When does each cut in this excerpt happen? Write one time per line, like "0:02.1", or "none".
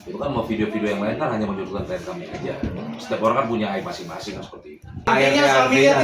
0:05.1